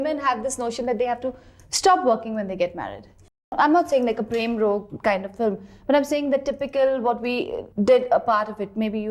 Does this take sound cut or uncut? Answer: cut